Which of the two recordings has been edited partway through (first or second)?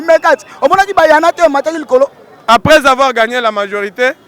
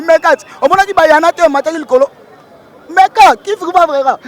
first